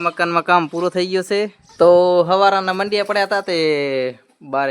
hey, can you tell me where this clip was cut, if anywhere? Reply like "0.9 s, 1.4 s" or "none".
1.6 s